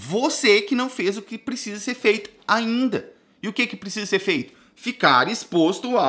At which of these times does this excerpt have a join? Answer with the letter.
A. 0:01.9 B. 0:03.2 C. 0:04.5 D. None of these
D